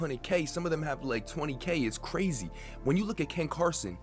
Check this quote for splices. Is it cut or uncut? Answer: cut